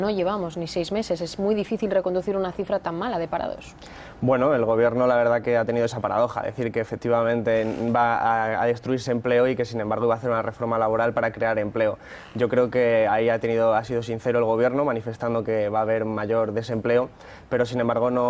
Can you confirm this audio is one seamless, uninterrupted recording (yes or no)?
no